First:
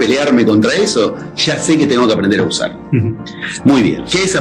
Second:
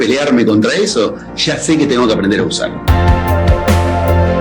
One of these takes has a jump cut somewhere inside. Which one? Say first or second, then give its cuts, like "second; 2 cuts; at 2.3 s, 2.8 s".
second; 1 cut; at 2.7 s